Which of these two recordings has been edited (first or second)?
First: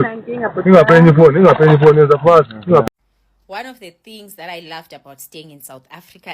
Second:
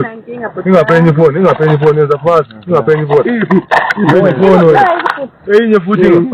first